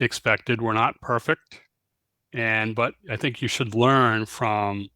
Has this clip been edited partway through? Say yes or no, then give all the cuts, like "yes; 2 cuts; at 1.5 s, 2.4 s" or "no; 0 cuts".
no; 0 cuts